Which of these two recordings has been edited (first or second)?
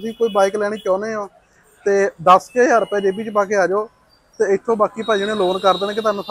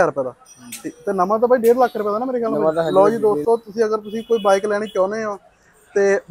second